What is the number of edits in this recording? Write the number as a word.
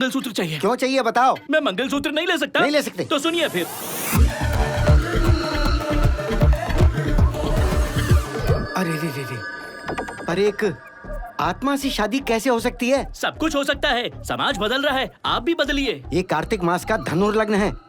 one